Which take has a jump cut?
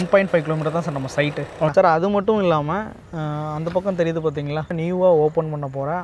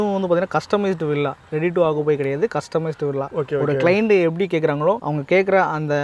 first; 2 cuts; at 1.7 s, 4.7 s

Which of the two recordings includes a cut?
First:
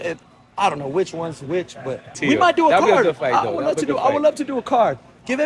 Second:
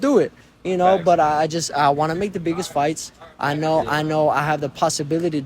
first; 1 cut; at 2.1 s

